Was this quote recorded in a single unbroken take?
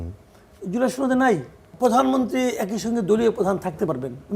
no; 1 cut; at 1.7 s

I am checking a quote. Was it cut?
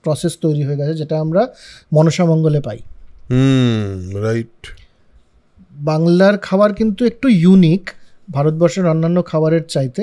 no; 0 cuts

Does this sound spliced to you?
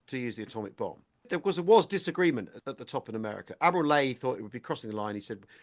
yes; 2 cuts; at 1.3 s, 2.6 s

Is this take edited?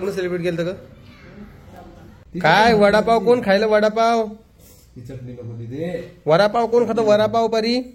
yes; 1 cut; at 2.2 s

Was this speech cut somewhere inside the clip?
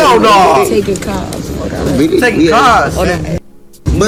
no; 0 cuts

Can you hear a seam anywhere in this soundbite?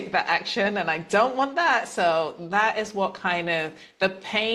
no; 0 cuts

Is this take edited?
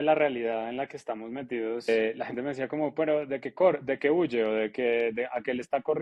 yes; 1 cut; at 2.1 s

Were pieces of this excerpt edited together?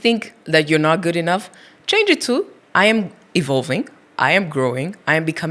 no; 0 cuts

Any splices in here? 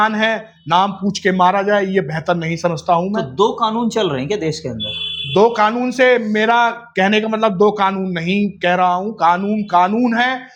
no; 0 cuts

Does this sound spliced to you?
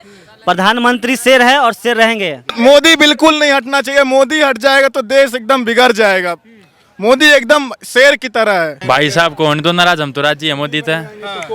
yes; 2 cuts; at 2.6 s, 8.8 s

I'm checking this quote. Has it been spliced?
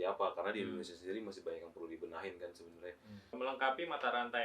yes; 1 cut; at 3.3 s

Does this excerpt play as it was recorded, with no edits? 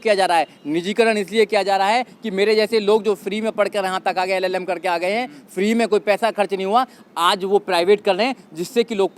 yes; 0 cuts

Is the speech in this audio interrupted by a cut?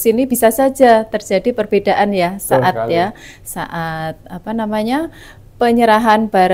no; 0 cuts

